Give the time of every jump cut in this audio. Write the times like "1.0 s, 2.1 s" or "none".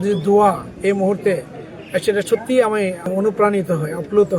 3.1 s